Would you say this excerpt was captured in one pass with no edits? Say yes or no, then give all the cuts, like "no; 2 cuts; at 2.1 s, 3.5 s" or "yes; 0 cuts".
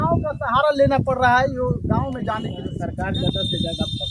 no; 1 cut; at 2.6 s